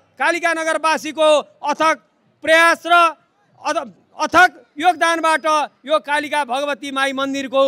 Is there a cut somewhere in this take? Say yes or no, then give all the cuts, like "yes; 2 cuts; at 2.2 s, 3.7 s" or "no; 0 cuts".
no; 0 cuts